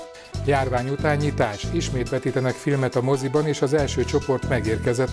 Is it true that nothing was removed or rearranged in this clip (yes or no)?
yes